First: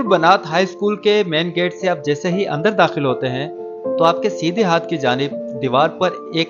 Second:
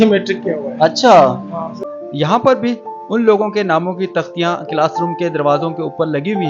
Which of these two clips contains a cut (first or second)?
second